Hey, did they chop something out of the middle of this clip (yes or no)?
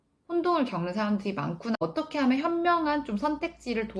yes